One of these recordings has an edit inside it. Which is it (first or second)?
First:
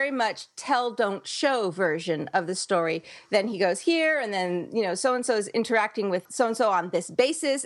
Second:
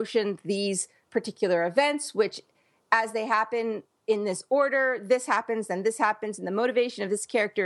first